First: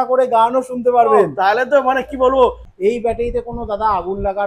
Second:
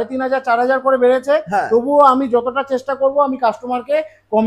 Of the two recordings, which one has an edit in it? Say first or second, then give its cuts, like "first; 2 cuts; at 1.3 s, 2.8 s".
first; 1 cut; at 2.7 s